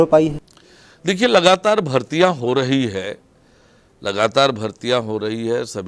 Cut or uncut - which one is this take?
uncut